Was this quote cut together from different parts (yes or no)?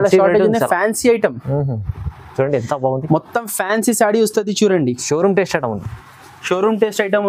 no